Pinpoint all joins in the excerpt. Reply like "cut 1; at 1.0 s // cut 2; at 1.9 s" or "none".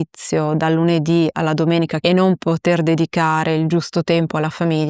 cut 1; at 2.0 s